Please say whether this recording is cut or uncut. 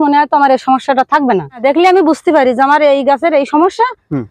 cut